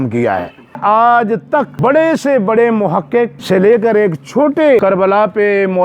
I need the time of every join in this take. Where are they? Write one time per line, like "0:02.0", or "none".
0:00.8
0:01.8
0:03.4
0:04.8

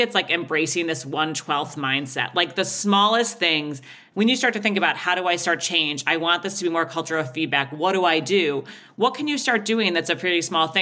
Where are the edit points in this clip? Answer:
0:04.0

